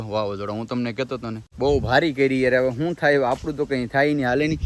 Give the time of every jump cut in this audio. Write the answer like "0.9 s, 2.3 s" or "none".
none